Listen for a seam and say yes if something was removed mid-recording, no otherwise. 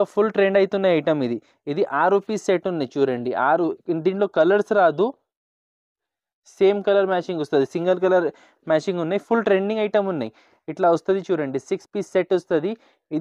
no